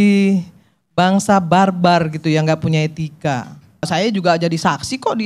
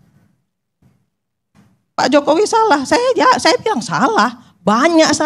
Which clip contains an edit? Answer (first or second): first